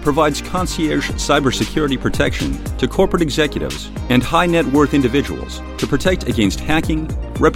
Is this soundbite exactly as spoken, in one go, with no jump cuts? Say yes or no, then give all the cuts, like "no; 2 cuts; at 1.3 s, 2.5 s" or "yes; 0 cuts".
yes; 0 cuts